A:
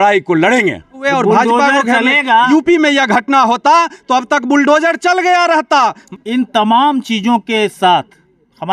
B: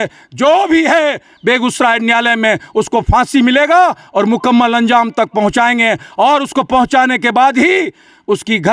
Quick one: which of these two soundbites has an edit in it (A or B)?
A